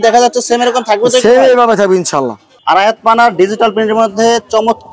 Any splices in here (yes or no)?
yes